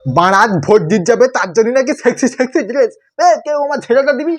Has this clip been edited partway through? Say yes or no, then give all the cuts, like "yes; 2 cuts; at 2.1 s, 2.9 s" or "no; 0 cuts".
no; 0 cuts